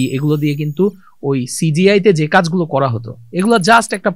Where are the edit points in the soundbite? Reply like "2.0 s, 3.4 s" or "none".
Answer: none